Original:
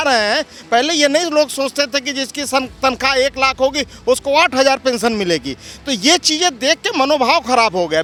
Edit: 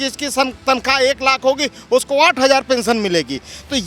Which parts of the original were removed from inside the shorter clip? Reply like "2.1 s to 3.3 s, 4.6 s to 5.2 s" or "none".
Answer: none